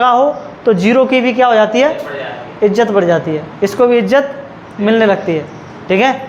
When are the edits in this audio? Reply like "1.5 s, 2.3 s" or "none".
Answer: none